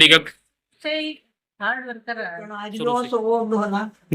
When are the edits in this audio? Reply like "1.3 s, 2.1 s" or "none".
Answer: 2.6 s